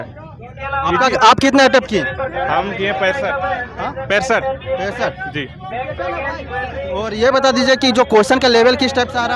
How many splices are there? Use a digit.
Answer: 0